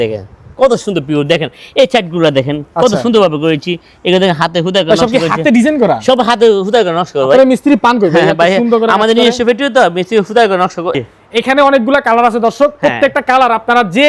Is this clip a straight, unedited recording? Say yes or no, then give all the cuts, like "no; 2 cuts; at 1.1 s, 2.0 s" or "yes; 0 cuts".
no; 1 cut; at 10.9 s